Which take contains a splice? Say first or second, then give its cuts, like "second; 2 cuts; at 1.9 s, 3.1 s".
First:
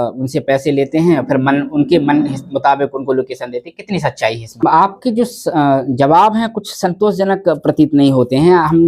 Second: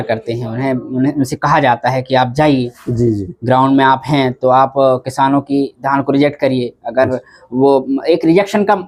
first; 1 cut; at 4.6 s